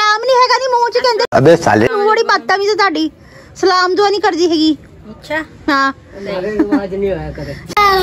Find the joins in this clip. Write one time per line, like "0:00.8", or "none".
none